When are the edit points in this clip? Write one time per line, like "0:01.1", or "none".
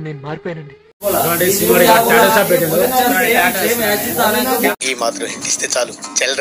0:01.0
0:04.8